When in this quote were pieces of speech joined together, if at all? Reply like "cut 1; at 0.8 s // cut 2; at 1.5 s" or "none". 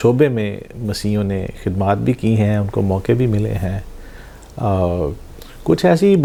none